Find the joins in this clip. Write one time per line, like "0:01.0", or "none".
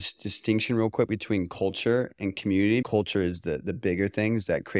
0:02.8

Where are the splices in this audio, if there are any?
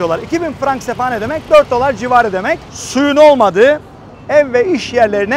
0:02.6

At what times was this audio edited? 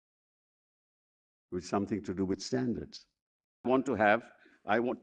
0:03.7

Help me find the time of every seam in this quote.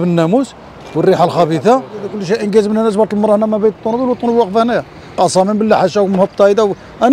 0:02.2

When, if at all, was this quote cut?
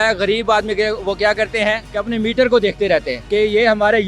0:01.9
0:03.2

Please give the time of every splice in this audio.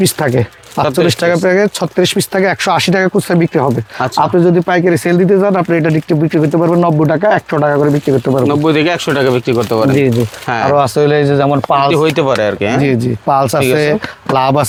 none

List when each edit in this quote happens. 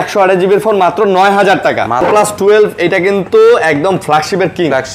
0:02.0

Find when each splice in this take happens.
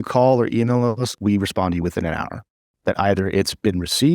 0:01.1

